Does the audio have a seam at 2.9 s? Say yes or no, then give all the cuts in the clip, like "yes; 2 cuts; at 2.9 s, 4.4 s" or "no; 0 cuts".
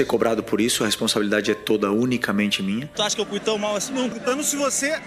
yes; 2 cuts; at 2.9 s, 4.1 s